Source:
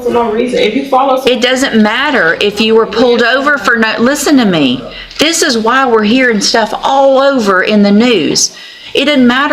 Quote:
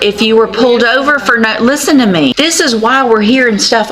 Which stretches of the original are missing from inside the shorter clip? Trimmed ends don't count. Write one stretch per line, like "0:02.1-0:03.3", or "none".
0:04.7-0:05.2